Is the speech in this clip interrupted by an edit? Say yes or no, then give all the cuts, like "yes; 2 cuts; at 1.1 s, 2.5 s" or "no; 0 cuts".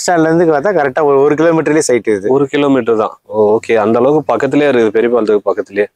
no; 0 cuts